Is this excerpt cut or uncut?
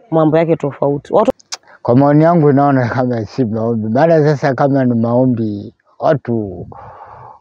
cut